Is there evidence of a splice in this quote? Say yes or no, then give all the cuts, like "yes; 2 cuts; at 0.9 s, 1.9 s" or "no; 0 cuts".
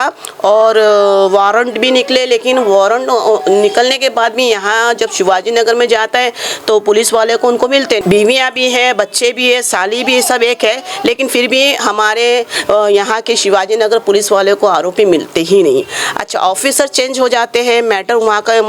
yes; 1 cut; at 8.0 s